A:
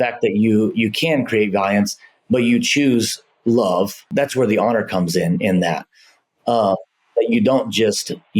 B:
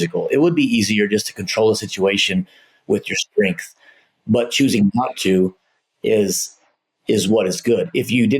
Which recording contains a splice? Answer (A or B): A